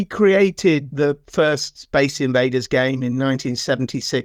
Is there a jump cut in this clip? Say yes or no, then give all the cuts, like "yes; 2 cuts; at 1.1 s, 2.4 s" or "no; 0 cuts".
no; 0 cuts